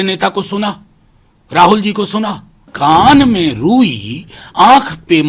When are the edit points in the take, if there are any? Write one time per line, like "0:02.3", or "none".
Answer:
0:02.7